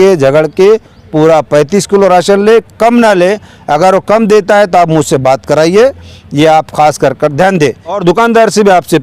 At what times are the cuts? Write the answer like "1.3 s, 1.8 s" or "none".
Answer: 8.0 s